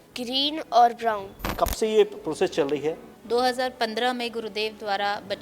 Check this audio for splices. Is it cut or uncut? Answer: cut